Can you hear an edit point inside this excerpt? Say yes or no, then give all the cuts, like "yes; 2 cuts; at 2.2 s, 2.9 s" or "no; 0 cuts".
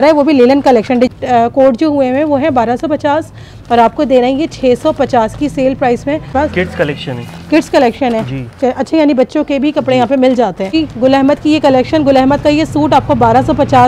yes; 3 cuts; at 1.1 s, 6.3 s, 10.7 s